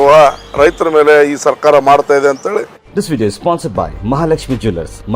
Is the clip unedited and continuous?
no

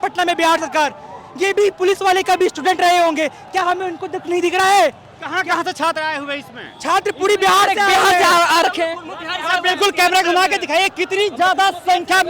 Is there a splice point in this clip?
no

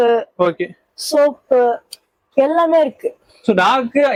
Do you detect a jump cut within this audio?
no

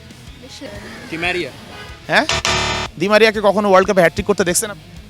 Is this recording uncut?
yes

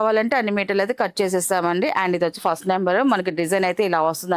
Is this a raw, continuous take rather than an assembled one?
yes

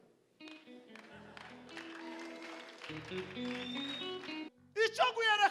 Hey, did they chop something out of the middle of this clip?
yes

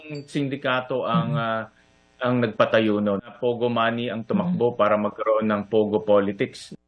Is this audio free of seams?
no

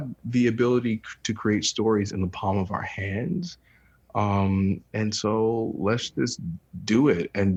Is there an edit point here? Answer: no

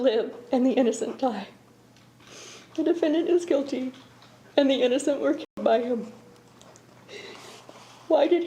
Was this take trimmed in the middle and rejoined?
no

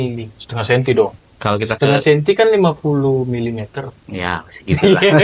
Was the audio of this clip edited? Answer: yes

